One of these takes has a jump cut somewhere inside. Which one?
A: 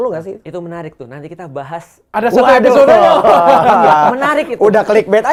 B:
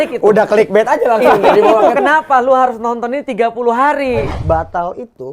B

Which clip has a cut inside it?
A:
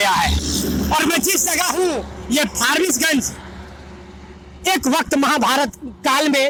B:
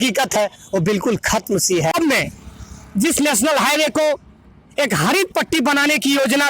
B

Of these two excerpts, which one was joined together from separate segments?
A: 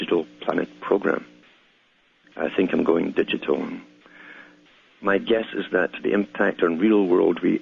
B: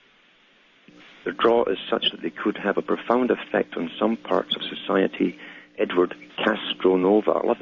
B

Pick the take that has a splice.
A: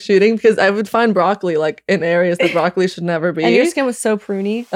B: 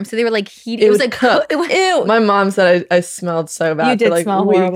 B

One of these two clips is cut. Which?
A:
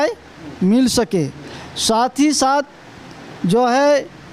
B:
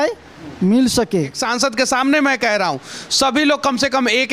B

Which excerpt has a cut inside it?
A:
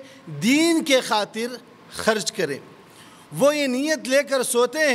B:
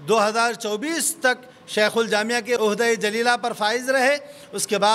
B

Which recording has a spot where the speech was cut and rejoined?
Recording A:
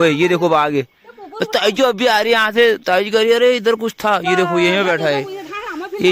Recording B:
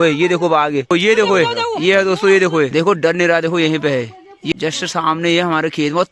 B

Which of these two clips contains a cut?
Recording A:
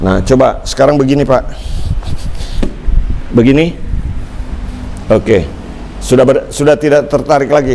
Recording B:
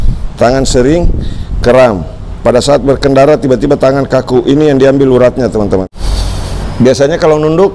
B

